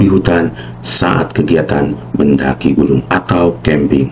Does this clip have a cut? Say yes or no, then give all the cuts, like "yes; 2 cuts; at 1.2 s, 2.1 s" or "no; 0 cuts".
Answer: yes; 1 cut; at 3.1 s